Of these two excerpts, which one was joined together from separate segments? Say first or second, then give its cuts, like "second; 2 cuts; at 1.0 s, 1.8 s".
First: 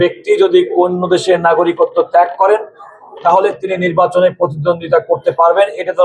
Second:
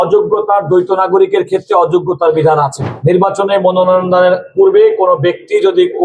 second; 1 cut; at 2.8 s